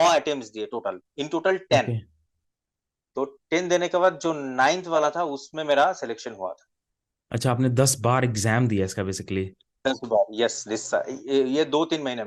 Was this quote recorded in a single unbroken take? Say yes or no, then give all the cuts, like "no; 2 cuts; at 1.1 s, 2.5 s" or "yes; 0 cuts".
yes; 0 cuts